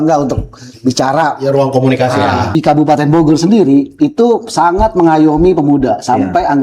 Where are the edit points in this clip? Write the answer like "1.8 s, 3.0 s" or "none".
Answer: 2.6 s

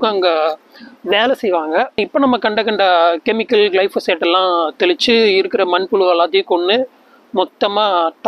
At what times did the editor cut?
2.0 s

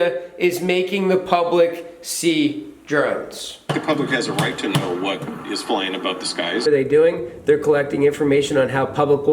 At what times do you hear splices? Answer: 3.7 s, 6.7 s

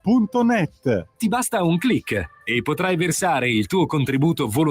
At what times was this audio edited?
1.1 s

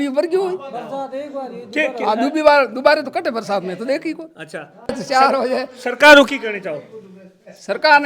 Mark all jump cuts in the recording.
4.9 s

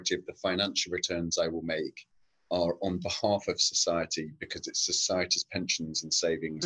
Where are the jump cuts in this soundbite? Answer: none

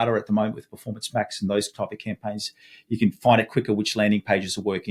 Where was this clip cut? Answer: none

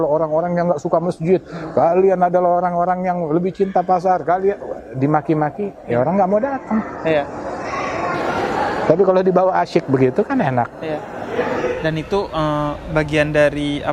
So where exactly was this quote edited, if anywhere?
none

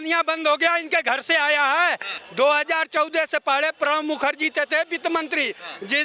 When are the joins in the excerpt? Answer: 2.1 s

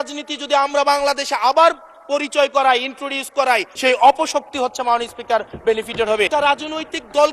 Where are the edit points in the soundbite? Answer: 3.7 s, 6.3 s

